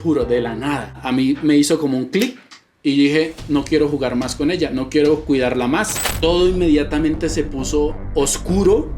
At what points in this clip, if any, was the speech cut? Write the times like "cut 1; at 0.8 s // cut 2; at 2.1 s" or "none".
cut 1; at 6.0 s